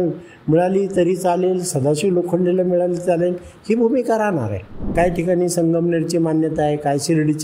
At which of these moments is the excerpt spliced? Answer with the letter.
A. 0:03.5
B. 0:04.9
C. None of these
B